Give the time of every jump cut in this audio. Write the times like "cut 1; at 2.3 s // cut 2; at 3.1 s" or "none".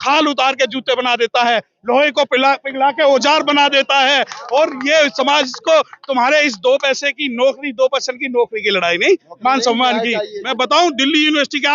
cut 1; at 10.4 s